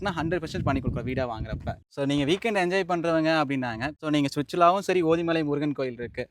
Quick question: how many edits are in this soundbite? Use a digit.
2